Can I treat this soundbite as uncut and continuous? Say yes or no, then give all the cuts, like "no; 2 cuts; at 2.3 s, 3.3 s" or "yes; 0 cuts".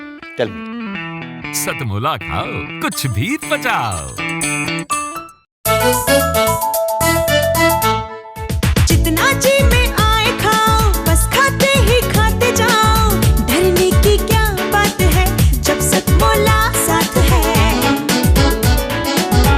no; 1 cut; at 5.5 s